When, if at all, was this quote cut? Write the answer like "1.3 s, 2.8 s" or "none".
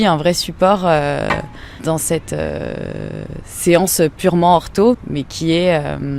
1.8 s, 4.9 s

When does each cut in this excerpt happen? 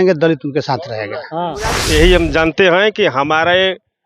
1.7 s

